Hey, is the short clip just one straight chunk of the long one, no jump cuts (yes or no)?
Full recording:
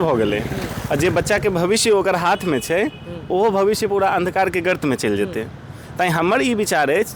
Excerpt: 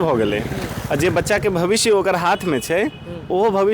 yes